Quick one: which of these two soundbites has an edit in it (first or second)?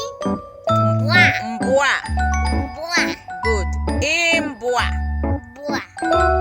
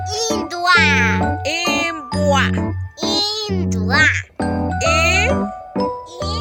first